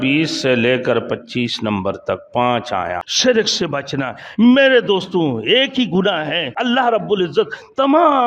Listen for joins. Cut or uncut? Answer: cut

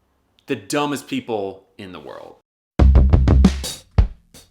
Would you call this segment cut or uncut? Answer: cut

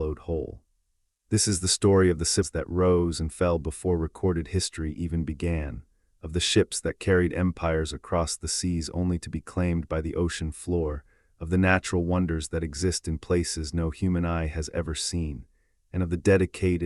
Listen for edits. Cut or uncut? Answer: cut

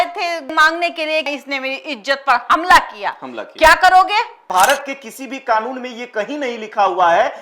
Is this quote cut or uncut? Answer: cut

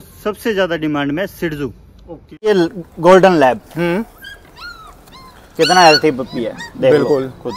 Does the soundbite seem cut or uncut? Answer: cut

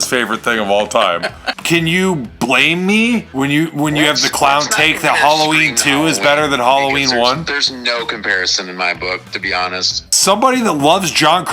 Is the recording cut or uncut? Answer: cut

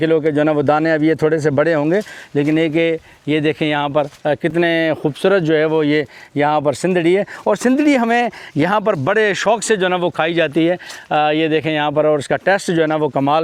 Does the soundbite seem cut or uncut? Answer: uncut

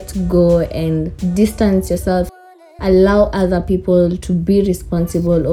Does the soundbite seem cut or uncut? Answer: uncut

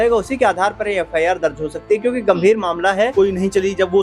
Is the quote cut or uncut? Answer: cut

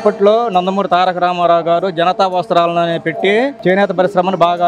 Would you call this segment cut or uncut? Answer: uncut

